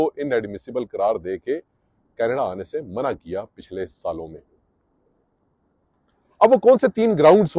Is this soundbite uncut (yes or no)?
yes